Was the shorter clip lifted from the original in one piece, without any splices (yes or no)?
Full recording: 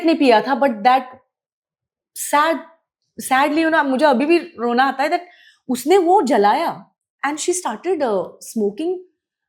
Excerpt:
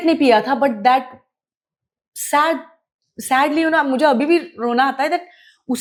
yes